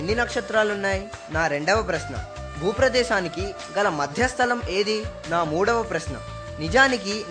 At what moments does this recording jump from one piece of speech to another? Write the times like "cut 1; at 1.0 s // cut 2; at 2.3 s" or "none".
cut 1; at 1.2 s // cut 2; at 5.1 s